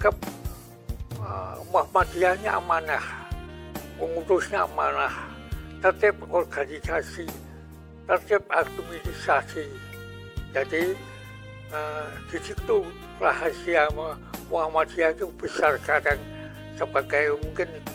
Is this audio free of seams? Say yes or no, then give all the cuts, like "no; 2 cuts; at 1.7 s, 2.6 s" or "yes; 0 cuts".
yes; 0 cuts